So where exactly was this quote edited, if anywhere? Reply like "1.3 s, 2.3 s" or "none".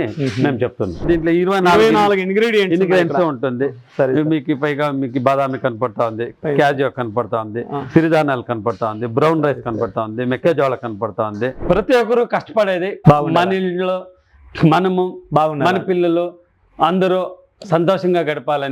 1.0 s, 11.6 s